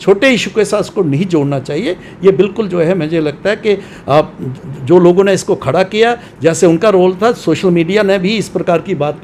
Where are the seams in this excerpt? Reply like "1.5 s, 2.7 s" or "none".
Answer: none